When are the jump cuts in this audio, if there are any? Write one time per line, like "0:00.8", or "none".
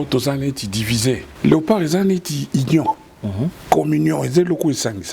0:01.3